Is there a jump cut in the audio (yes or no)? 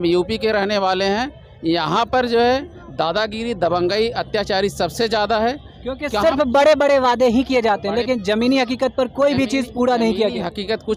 no